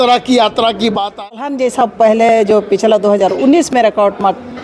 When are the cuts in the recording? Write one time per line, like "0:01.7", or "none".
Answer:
0:01.3